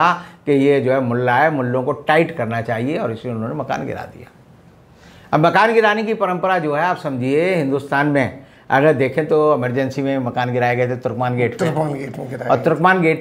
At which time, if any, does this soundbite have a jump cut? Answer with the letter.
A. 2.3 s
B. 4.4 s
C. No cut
C